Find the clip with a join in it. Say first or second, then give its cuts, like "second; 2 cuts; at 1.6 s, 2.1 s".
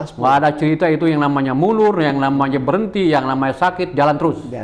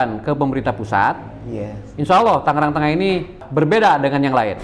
second; 1 cut; at 3.4 s